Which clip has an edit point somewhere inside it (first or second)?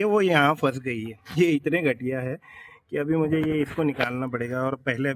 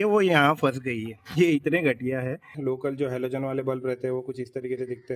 second